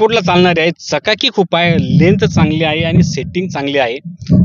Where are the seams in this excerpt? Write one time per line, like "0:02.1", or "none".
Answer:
none